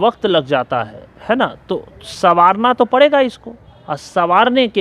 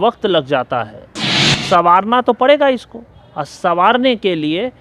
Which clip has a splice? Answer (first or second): second